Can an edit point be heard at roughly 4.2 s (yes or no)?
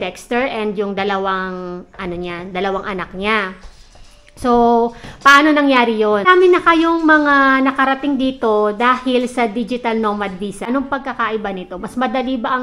no